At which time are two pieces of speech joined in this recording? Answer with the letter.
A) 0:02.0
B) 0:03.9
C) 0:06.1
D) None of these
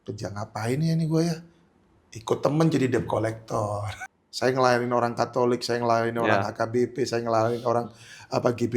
B